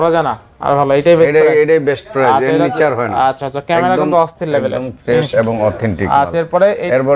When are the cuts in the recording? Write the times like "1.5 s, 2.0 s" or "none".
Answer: none

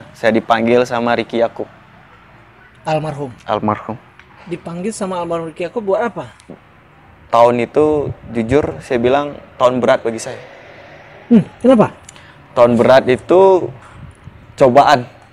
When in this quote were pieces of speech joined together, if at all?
6.5 s

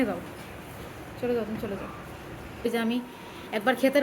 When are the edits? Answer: 2.7 s

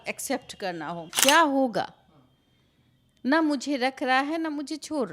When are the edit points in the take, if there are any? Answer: 1.1 s

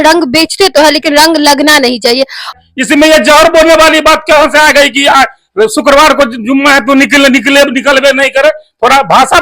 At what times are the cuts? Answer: 2.5 s

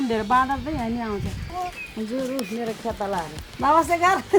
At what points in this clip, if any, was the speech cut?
1.4 s, 3.4 s

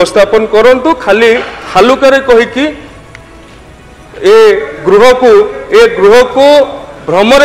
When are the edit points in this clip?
none

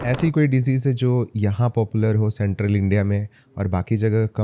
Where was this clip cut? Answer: none

